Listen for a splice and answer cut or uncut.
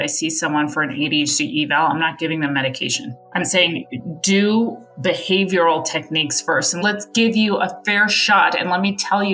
cut